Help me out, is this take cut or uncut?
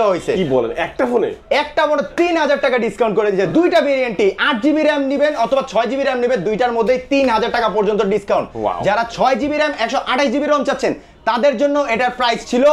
uncut